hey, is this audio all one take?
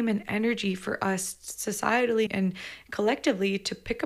no; 1 cut; at 2.3 s

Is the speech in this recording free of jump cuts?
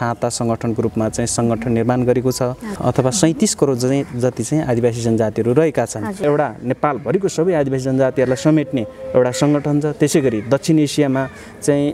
no; 2 cuts; at 2.7 s, 6.2 s

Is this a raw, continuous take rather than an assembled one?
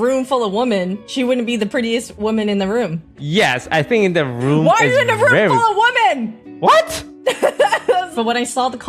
no; 5 cuts; at 1.0 s, 2.1 s, 3.2 s, 6.4 s, 8.1 s

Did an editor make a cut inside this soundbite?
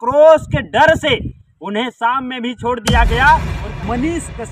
yes; 1 cut; at 3.6 s

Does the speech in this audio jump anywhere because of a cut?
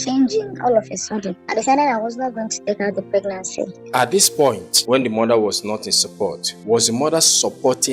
yes; 4 cuts; at 1.4 s, 3.8 s, 4.7 s, 6.5 s

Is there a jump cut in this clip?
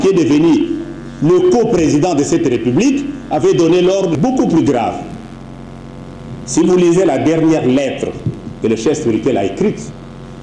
yes; 1 cut; at 4.1 s

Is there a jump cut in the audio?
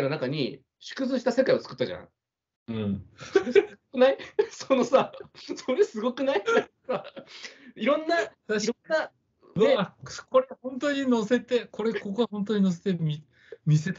no; 0 cuts

